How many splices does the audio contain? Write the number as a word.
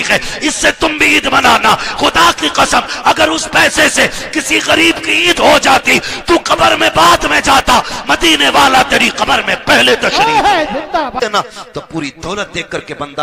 one